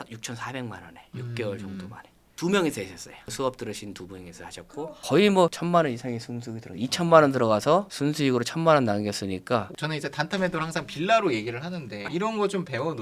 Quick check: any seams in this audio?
no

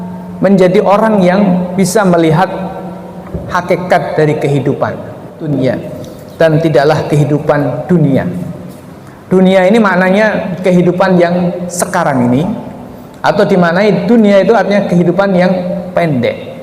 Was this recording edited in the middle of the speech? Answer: yes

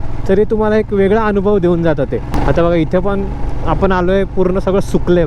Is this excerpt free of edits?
no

